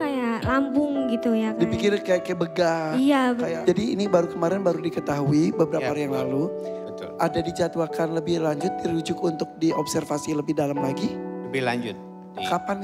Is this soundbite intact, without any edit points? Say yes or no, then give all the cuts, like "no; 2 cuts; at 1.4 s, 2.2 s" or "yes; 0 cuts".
no; 1 cut; at 3.5 s